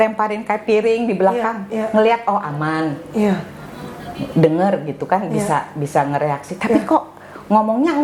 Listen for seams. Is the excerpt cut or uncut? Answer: uncut